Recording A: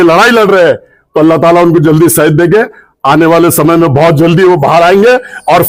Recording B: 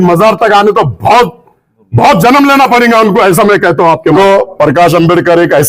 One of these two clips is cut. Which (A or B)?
B